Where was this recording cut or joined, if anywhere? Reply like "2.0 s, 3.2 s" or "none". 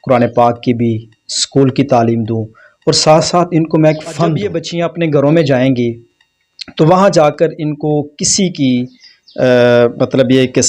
4.7 s